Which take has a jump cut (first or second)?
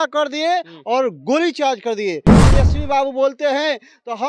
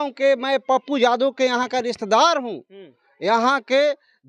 first